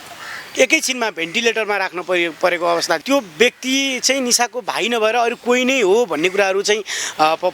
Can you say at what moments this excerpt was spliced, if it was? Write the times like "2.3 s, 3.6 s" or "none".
3.0 s

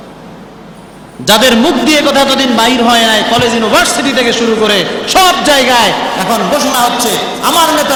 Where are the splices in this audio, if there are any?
none

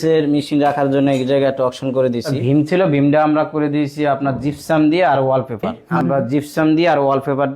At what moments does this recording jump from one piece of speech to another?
2.3 s, 5.8 s

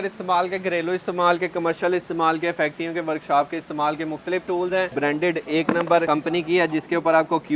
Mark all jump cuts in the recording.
4.9 s

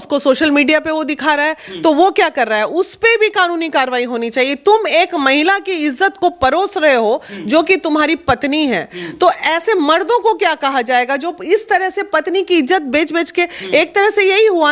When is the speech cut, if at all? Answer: none

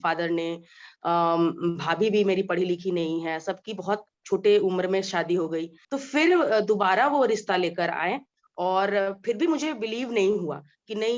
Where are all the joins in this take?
5.8 s

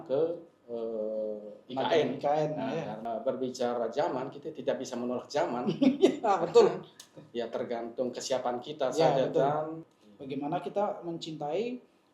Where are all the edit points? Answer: 3.0 s, 9.9 s

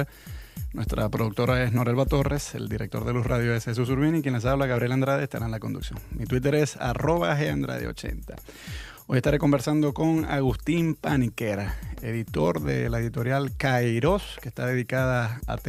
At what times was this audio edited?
11.4 s

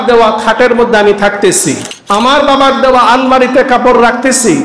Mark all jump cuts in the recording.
1.9 s

